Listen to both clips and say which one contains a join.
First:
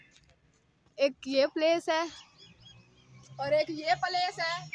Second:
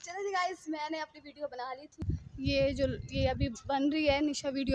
second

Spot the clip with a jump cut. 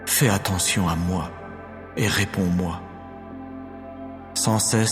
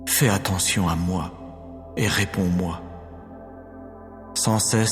second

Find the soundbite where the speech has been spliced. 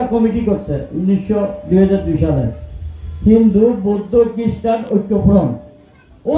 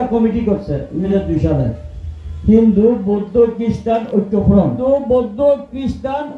second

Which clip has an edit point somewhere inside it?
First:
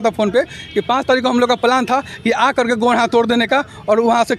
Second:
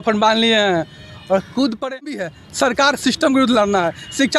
second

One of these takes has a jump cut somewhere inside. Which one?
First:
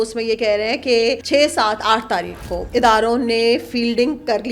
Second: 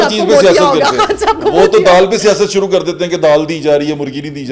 first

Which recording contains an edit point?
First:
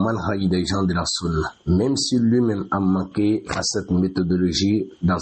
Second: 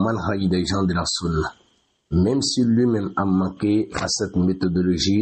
first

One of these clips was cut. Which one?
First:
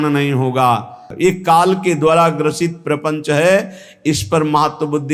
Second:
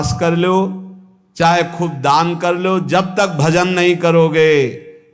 first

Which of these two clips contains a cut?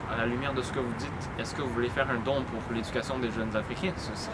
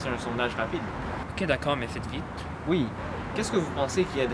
second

